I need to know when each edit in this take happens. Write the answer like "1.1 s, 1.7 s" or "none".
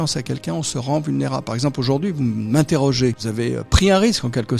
3.2 s

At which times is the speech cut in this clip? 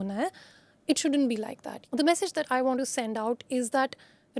1.8 s

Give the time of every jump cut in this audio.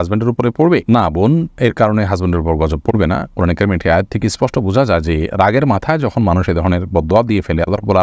none

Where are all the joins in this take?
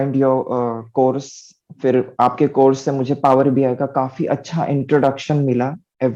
none

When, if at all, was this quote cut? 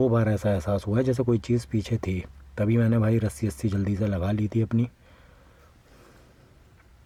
none

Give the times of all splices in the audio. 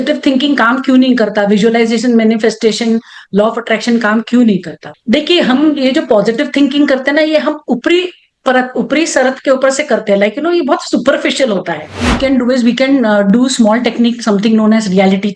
12.1 s

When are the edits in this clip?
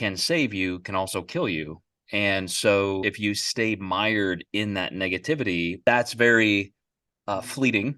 3.1 s, 5.8 s

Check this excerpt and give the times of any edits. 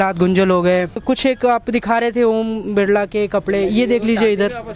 1.0 s

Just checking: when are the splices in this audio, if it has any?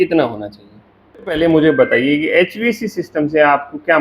1.3 s

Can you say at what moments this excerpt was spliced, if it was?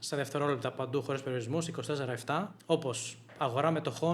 2.6 s

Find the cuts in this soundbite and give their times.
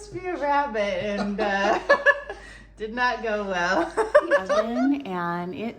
4.7 s

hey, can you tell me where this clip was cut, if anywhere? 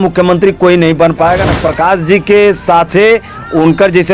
1.5 s

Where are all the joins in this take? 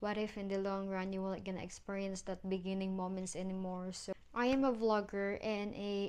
4.1 s

